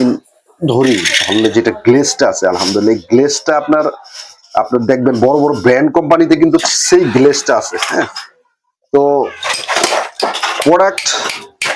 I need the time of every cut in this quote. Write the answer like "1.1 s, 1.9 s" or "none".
none

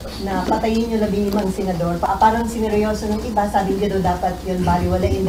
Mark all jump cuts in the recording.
2.1 s

